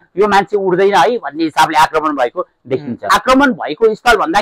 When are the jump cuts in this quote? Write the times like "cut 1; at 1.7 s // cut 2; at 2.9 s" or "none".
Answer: cut 1; at 3.1 s